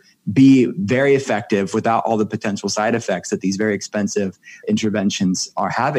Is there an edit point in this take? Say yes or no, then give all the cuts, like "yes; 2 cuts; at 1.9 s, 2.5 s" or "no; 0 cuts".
no; 0 cuts